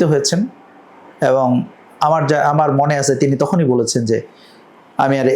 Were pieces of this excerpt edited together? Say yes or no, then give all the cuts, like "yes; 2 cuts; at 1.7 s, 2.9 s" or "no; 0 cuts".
no; 0 cuts